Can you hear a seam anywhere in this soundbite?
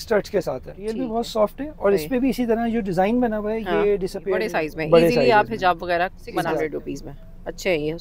yes; 3 cuts; at 1.0 s, 4.5 s, 6.6 s

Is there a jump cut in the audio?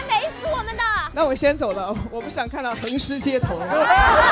yes; 1 cut; at 1.1 s

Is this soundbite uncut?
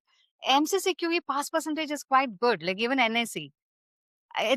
yes; 0 cuts

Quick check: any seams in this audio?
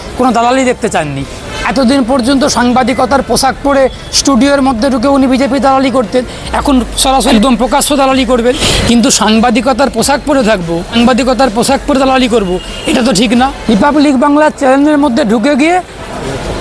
yes; 4 cuts; at 7.3 s, 8.7 s, 10.9 s, 13.6 s

